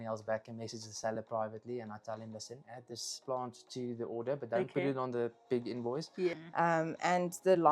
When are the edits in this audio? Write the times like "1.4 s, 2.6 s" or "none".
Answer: 6.3 s